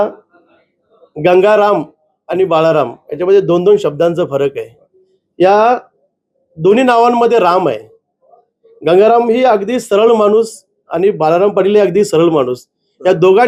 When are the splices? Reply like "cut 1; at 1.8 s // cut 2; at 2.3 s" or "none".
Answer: none

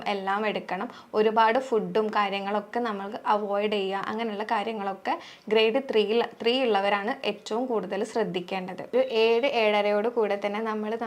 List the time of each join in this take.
cut 1; at 8.9 s

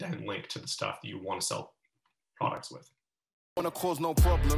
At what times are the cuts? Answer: cut 1; at 3.6 s

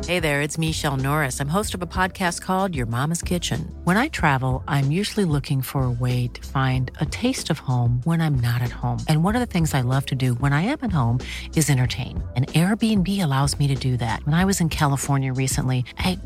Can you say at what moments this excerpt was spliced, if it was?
none

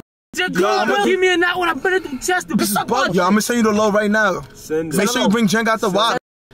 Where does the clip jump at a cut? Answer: cut 1; at 1.0 s // cut 2; at 3.1 s

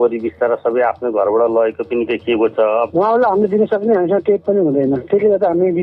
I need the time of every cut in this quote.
cut 1; at 2.9 s

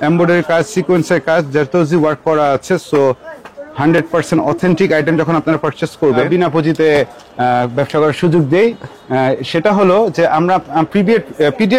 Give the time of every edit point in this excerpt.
cut 1; at 6.2 s

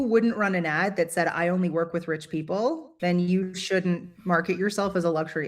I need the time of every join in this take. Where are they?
cut 1; at 2.9 s

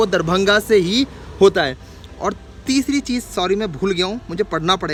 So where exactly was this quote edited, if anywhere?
none

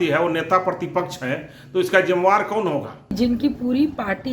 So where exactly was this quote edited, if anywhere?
cut 1; at 3.1 s

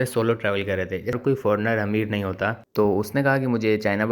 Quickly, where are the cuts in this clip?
cut 1; at 1.1 s // cut 2; at 2.6 s

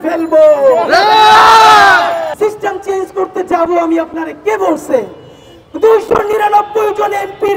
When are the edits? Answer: cut 1; at 2.3 s

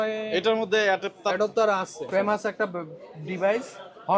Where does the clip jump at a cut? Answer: cut 1; at 2.0 s

